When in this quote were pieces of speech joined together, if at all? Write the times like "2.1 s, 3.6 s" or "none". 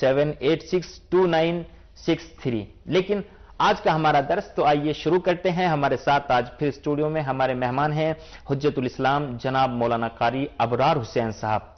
none